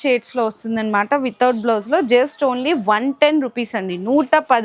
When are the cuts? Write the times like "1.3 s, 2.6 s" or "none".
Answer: none